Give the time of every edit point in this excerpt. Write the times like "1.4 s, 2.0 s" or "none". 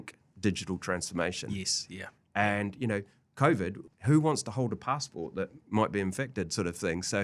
3.8 s